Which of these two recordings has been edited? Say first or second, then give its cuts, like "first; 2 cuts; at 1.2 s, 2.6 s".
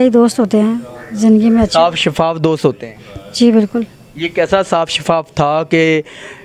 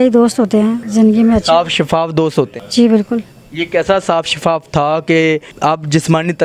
second; 3 cuts; at 0.8 s, 2.6 s, 5.5 s